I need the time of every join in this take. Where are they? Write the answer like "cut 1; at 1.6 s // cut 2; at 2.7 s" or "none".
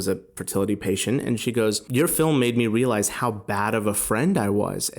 cut 1; at 1.8 s